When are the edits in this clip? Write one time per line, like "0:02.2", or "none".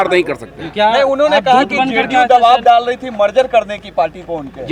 none